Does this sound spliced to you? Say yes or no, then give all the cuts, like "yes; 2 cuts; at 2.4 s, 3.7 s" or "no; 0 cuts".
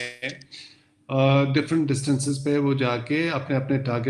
no; 0 cuts